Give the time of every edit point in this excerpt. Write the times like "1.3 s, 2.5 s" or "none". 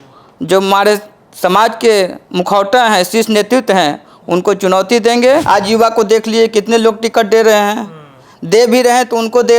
5.4 s